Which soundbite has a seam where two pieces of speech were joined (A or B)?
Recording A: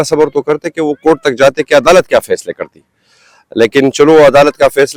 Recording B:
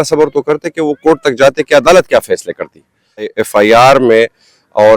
B